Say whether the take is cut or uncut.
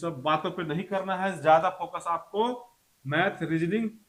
uncut